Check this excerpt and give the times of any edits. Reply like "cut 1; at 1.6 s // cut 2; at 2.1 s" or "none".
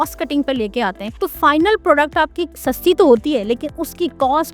cut 1; at 1.1 s // cut 2; at 2.5 s

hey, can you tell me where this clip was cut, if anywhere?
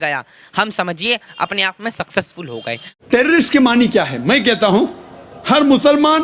cut 1; at 2.9 s

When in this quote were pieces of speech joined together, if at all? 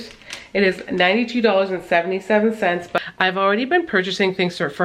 cut 1; at 2.9 s

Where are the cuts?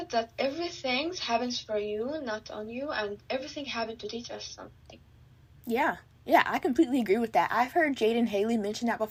none

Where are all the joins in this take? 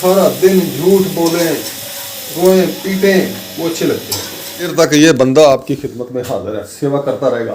cut 1; at 4.7 s

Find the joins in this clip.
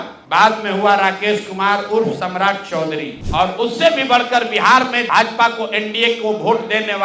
cut 1; at 3.2 s

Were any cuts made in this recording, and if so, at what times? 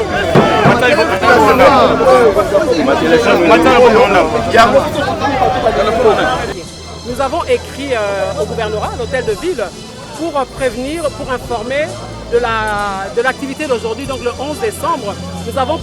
cut 1; at 6.5 s

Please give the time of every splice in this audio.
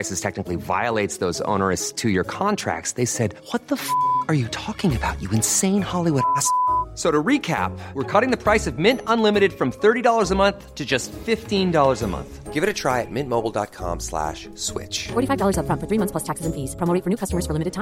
none

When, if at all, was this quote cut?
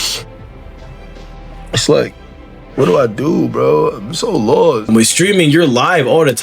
cut 1; at 4.8 s

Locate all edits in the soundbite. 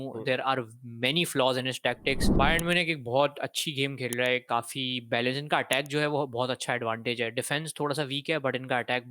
cut 1; at 2.3 s

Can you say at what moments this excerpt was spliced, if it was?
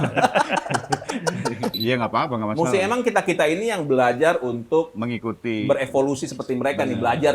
cut 1; at 1.7 s

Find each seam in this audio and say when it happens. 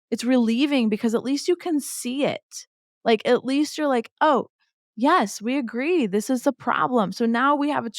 none

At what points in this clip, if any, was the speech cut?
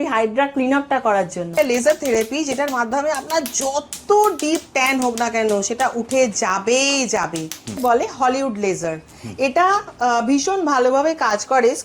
cut 1; at 1.5 s // cut 2; at 7.7 s

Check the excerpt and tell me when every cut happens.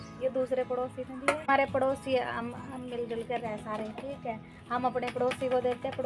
cut 1; at 1.5 s

